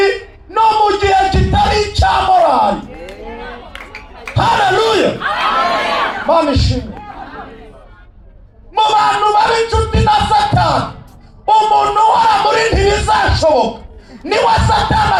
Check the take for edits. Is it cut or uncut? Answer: uncut